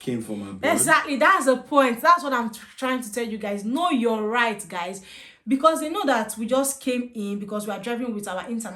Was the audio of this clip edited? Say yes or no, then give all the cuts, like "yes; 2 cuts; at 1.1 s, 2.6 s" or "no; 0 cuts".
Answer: no; 0 cuts